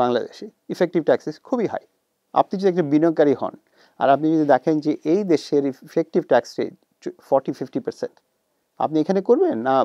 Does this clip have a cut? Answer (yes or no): no